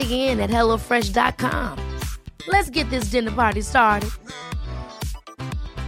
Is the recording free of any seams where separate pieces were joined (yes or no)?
yes